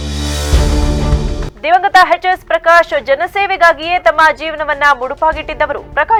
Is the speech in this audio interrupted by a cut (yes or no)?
no